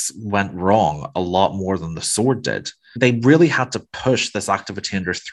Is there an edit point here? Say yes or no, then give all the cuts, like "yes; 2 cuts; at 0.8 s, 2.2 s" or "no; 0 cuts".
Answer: yes; 1 cut; at 2.9 s